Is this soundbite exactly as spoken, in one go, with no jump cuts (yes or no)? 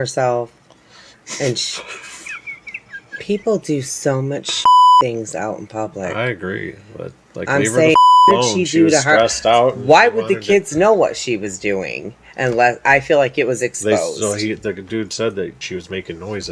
no